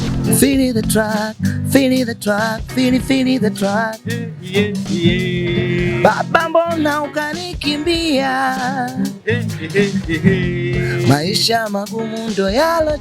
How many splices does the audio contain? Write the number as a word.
zero